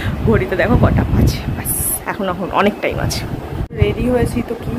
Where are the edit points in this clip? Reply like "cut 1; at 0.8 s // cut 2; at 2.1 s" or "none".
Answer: cut 1; at 3.8 s